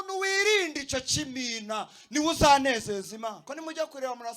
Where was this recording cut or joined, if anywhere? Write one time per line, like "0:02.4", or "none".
0:03.4